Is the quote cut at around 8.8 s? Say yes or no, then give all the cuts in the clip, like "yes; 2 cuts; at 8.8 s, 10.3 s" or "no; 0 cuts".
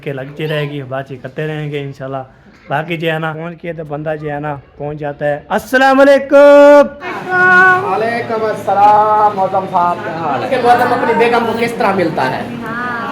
no; 3 cuts; at 3.4 s, 7.2 s, 10.5 s